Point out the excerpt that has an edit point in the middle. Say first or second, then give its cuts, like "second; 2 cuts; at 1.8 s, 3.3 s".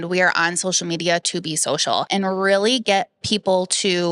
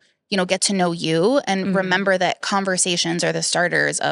first; 1 cut; at 2.1 s